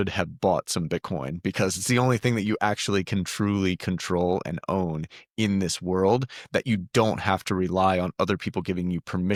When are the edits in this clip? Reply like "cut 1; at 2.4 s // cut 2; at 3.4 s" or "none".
none